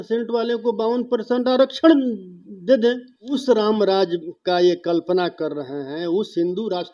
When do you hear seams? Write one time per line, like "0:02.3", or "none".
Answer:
0:03.4